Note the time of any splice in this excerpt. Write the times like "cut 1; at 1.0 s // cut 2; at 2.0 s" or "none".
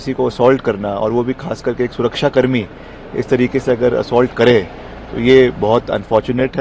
none